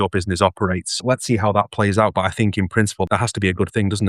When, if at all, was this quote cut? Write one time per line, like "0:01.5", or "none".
0:00.9
0:03.1